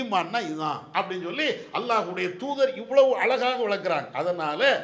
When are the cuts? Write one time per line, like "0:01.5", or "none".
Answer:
none